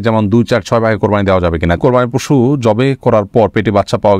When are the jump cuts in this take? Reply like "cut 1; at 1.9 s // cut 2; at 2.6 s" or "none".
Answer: cut 1; at 1.8 s